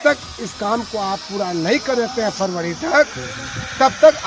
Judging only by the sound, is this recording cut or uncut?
uncut